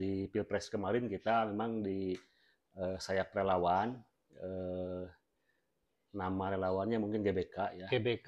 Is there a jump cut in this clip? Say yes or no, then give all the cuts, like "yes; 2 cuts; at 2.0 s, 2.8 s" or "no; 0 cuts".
no; 0 cuts